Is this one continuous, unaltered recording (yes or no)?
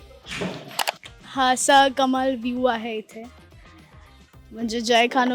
no